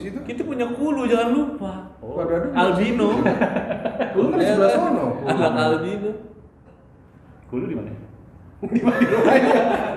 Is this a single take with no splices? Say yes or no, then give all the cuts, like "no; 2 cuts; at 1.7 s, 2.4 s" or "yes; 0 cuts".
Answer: yes; 0 cuts